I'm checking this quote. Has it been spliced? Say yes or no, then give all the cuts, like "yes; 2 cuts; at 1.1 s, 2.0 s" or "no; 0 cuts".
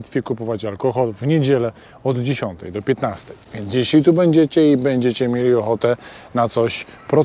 no; 0 cuts